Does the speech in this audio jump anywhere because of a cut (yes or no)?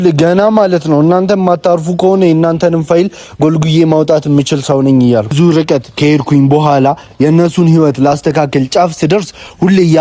yes